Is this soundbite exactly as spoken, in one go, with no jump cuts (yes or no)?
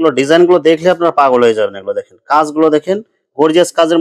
yes